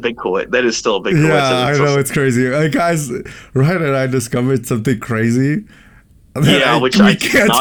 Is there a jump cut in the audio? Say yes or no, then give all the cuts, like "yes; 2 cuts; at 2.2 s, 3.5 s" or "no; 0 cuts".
no; 0 cuts